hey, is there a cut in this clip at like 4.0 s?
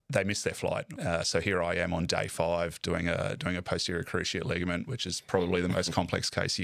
no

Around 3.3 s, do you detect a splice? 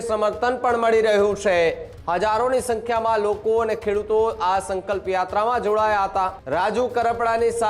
no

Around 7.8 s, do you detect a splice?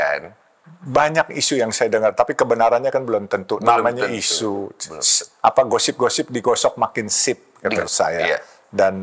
yes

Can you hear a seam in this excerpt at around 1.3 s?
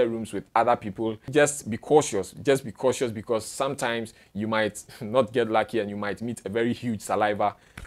yes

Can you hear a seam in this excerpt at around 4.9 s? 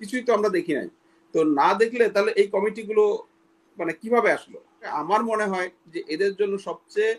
yes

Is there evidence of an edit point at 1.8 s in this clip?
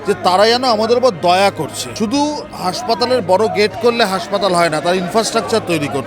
yes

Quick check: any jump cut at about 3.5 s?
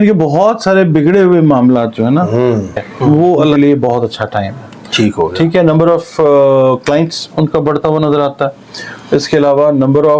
yes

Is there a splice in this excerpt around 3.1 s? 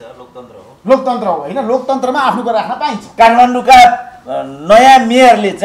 yes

